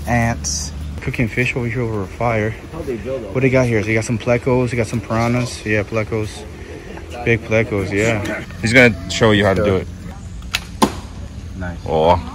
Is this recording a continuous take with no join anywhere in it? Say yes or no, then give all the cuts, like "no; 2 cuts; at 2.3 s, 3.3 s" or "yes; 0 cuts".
no; 2 cuts; at 1.1 s, 8.5 s